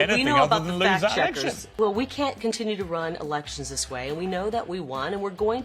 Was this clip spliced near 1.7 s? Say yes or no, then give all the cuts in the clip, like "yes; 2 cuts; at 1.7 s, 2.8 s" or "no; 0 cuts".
yes; 1 cut; at 1.7 s